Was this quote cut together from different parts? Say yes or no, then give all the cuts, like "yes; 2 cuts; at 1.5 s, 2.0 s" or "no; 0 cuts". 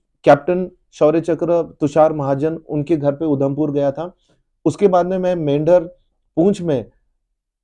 no; 0 cuts